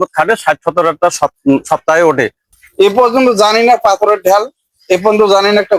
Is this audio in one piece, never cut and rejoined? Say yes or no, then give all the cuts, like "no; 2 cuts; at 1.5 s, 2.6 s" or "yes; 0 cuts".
no; 1 cut; at 2.4 s